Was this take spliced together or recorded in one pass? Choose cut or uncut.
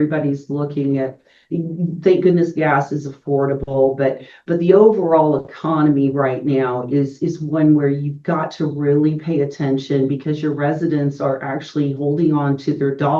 uncut